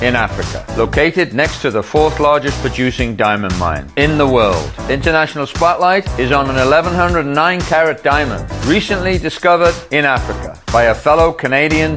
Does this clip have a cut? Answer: no; 0 cuts

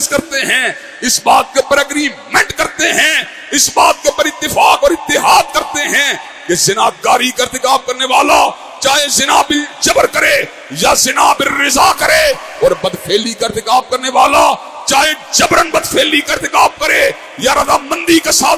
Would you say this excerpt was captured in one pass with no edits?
yes; 0 cuts

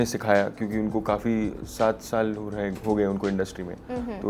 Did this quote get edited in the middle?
no; 0 cuts

